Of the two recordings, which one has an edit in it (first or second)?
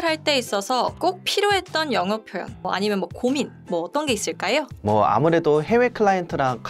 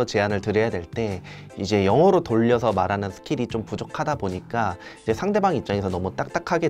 first